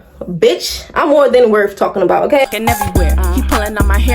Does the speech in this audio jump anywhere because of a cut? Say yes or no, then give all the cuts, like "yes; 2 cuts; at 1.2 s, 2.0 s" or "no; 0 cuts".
yes; 1 cut; at 2.4 s